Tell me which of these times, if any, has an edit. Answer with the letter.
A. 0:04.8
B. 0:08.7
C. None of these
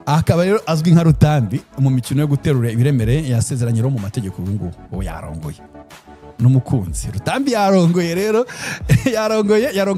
C